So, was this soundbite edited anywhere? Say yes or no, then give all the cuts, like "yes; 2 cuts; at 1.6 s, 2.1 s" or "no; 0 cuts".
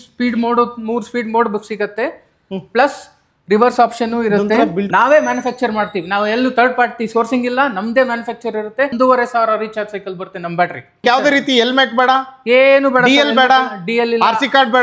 yes; 3 cuts; at 4.9 s, 8.9 s, 11.0 s